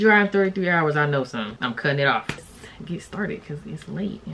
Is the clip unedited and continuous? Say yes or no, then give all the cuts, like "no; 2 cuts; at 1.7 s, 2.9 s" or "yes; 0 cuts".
no; 1 cut; at 2.4 s